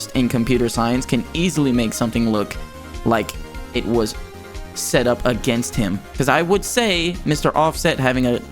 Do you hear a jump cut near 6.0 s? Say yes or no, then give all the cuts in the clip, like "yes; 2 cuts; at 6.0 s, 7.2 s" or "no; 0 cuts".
yes; 1 cut; at 6.0 s